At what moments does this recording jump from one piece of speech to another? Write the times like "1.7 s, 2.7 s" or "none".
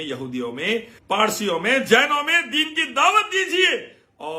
0.9 s

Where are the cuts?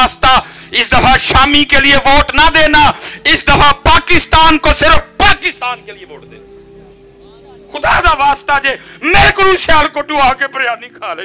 none

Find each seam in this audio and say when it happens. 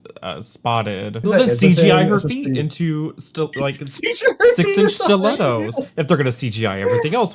1.2 s

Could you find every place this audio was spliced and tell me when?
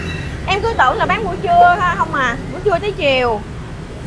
none

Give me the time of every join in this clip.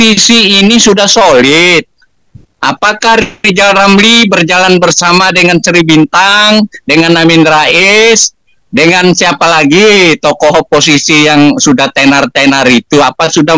none

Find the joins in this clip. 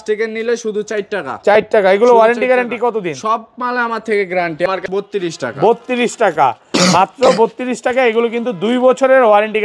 4.7 s

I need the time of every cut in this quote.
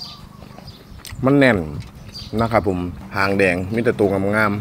3.0 s

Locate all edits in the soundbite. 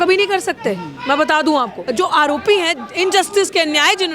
1.8 s

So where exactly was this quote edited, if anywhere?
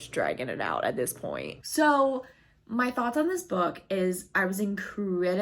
1.5 s

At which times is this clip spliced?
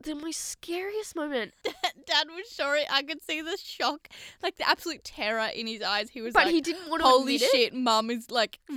1.5 s

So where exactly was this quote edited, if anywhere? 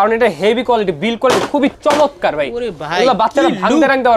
1.8 s

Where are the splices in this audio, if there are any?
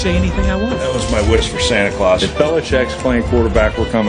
3.0 s

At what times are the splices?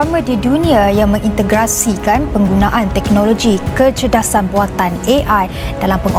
none

